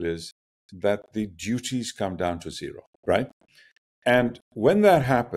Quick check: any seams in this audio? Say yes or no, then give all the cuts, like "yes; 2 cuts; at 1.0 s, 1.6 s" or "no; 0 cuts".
yes; 2 cuts; at 2.9 s, 4.5 s